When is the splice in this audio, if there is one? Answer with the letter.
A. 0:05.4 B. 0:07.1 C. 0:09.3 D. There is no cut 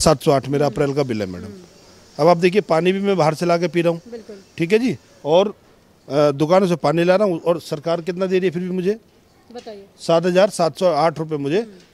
D